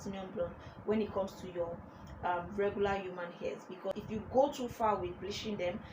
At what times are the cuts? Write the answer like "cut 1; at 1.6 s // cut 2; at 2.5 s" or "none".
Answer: cut 1; at 3.9 s